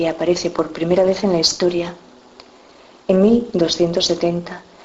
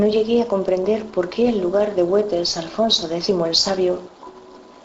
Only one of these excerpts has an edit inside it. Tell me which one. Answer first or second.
first